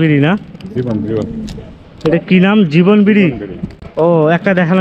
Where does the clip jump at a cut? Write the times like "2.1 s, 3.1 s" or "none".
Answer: none